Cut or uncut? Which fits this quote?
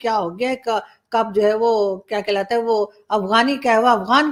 uncut